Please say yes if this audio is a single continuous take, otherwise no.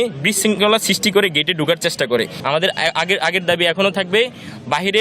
no